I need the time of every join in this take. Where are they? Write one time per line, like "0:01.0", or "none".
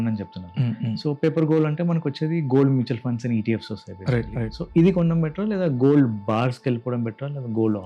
none